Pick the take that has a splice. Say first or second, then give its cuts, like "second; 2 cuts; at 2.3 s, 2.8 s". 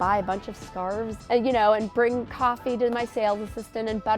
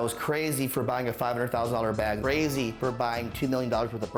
first; 1 cut; at 1.1 s